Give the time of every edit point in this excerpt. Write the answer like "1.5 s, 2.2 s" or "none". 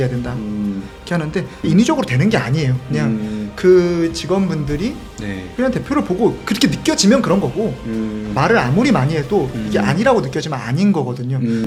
none

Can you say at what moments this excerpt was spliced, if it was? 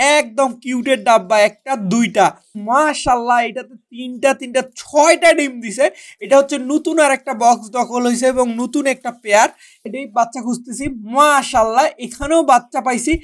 2.6 s, 9.9 s

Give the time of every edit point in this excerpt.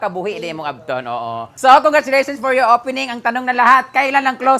1.5 s

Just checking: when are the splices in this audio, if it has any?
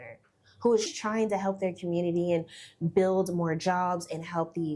1.0 s

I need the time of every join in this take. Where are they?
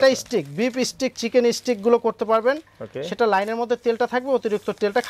none

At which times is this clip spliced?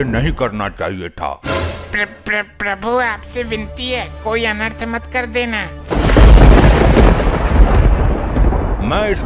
none

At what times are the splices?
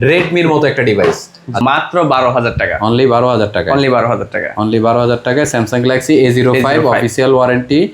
1.6 s

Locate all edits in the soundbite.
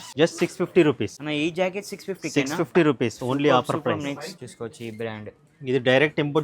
1.2 s, 4.4 s

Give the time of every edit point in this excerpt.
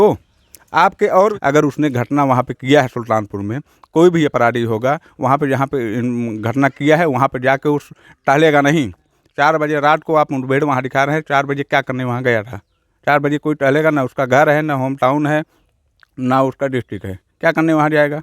1.3 s

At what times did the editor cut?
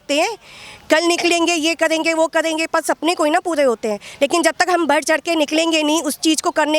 none

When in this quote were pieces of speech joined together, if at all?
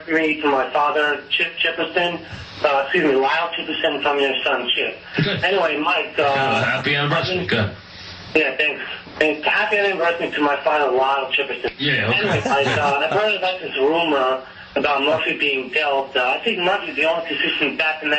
8.9 s

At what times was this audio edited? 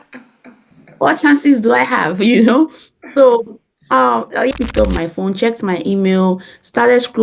4.5 s

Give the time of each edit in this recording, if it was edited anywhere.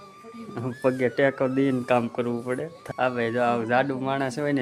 2.7 s

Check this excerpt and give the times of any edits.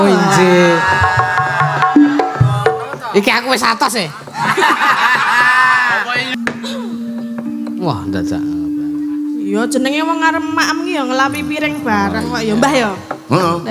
6.3 s

